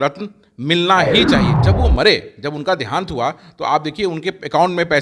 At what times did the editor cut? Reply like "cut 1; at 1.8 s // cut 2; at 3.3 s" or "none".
cut 1; at 1.5 s